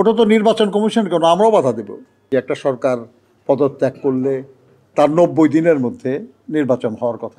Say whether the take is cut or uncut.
cut